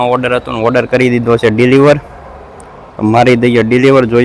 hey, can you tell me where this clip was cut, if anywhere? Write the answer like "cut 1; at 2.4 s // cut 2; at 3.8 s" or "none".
none